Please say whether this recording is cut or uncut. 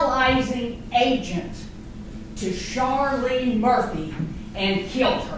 uncut